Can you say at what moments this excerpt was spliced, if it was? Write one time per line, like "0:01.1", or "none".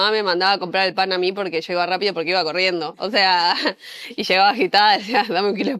none